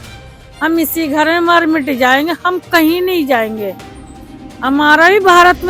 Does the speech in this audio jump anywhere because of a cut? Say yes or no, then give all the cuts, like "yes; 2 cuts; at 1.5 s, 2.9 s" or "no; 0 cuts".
no; 0 cuts